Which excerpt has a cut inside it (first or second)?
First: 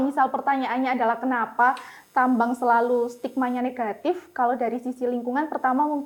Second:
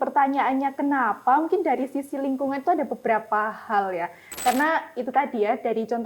second